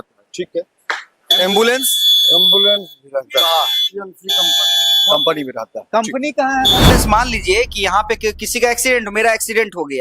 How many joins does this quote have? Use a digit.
1